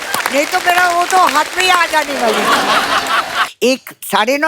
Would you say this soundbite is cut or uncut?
cut